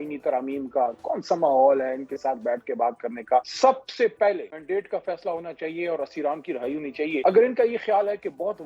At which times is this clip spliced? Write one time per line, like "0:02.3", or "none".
0:03.5
0:04.5
0:07.2